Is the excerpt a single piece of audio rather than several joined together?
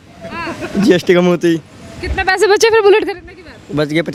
yes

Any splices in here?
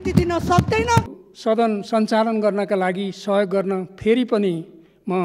yes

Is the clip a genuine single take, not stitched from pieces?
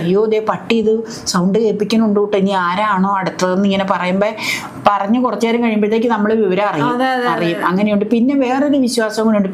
yes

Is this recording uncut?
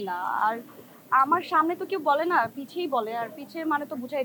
yes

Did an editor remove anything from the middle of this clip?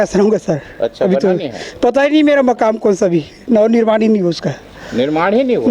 no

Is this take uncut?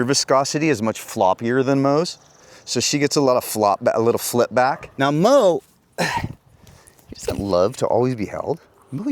no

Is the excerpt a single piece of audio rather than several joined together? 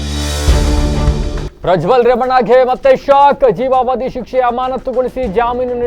no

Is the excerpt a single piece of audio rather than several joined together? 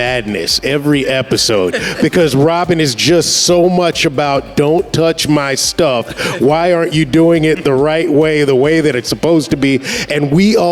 yes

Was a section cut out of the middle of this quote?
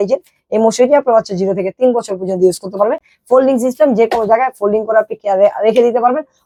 no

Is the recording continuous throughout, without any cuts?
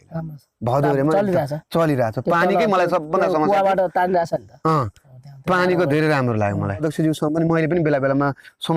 no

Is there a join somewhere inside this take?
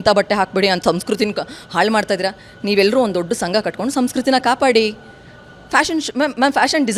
no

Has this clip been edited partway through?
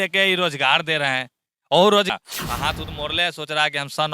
yes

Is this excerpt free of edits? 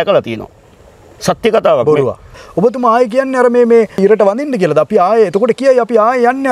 no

